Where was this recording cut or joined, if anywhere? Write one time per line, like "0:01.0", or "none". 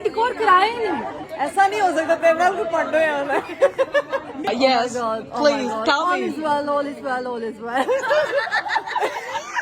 0:01.2
0:04.5